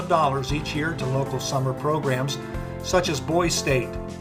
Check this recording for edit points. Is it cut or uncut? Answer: uncut